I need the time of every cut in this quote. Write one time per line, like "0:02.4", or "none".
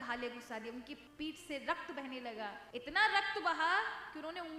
0:01.0
0:02.6